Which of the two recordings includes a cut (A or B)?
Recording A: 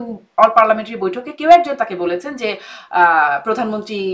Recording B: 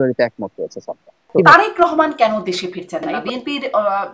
B